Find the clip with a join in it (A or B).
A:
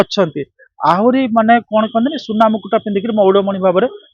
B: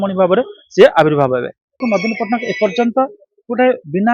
B